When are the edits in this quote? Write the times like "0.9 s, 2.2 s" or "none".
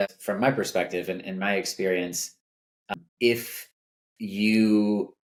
none